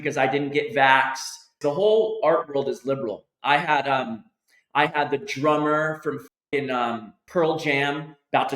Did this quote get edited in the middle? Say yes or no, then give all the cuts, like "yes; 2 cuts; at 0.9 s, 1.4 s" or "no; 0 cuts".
yes; 2 cuts; at 1.5 s, 7.1 s